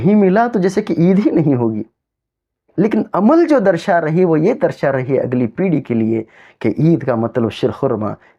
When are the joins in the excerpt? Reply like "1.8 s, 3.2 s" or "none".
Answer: 2.7 s